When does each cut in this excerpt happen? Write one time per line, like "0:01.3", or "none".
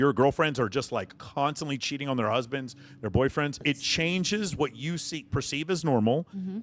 0:01.2
0:03.6

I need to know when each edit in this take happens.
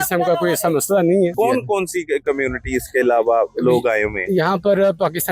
0:01.3

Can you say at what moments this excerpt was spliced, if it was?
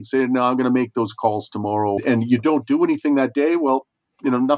0:02.0

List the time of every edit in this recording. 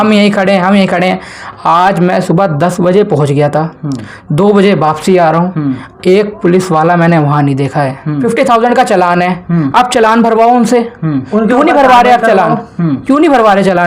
0:08.2

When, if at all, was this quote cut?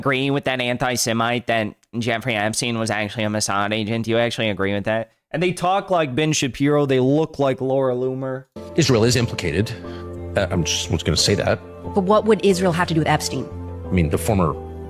none

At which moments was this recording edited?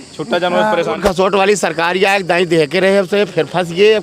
0:00.9

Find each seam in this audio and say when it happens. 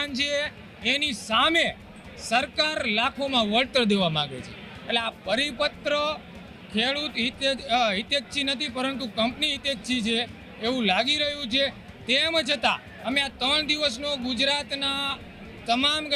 none

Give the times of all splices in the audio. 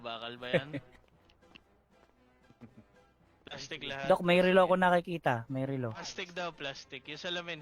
none

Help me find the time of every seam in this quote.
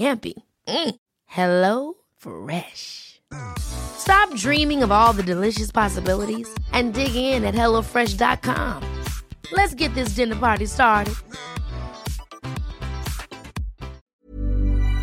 0:14.1

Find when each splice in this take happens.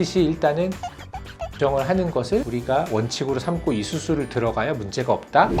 none

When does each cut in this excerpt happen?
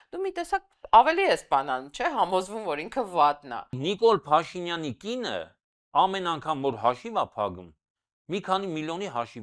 0:03.8

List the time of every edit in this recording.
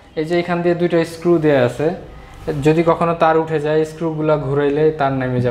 none

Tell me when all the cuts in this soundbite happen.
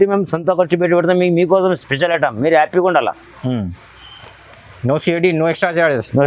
none

